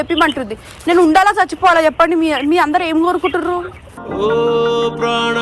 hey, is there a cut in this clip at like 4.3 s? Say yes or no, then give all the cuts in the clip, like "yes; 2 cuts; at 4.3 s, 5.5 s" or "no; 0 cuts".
no; 0 cuts